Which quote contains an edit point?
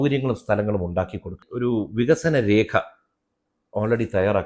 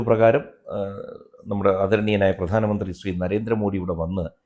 first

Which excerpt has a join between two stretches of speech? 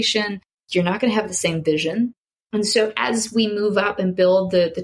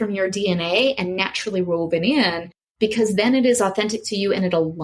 first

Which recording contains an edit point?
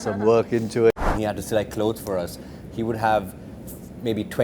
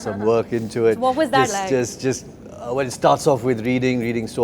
first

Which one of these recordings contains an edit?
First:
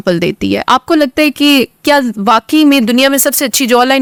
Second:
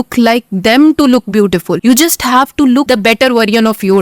second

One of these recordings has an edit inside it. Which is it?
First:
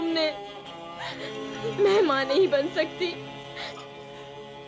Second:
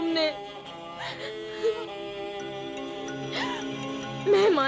first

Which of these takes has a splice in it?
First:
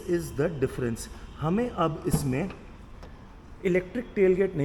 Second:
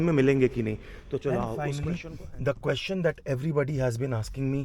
second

